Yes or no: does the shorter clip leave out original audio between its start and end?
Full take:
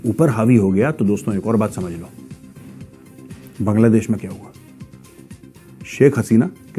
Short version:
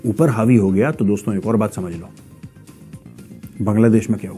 no